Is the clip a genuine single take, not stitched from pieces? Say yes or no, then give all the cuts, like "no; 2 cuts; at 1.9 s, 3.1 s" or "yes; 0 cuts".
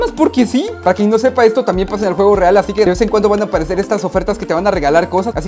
yes; 0 cuts